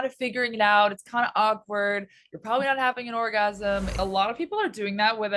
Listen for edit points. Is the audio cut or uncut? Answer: cut